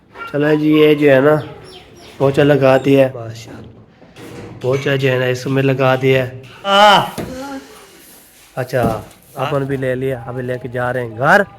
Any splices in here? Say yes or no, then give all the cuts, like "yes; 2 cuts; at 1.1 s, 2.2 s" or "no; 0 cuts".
yes; 3 cuts; at 3.1 s, 6.7 s, 9.3 s